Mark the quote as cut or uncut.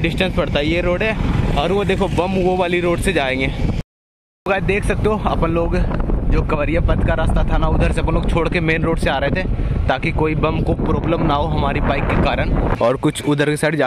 cut